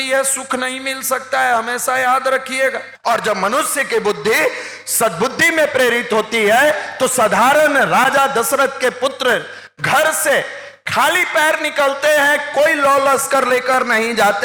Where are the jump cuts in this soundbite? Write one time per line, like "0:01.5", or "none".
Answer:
0:02.9